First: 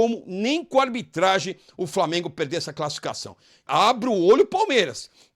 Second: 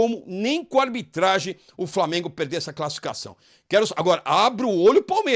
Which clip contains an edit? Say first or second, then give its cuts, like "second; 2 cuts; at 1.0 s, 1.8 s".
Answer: first; 1 cut; at 3.7 s